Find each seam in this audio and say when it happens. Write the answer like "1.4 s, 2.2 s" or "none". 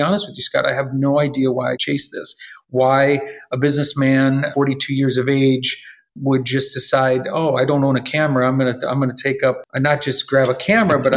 1.8 s, 4.5 s, 9.6 s